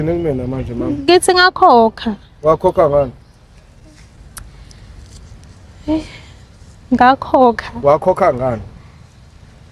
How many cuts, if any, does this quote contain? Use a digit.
0